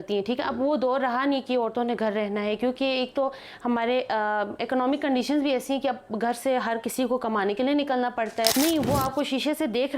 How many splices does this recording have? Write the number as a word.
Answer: one